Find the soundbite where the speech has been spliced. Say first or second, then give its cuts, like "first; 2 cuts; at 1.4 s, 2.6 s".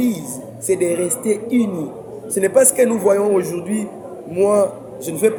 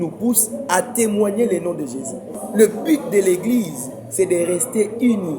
second; 1 cut; at 2.4 s